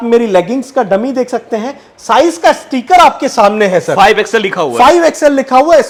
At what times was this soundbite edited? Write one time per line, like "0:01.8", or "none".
none